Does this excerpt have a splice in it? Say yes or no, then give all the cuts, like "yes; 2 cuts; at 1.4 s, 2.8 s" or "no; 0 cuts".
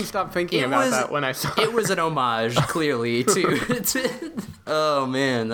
yes; 1 cut; at 4.5 s